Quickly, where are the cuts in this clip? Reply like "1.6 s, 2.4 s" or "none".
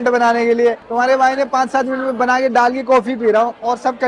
none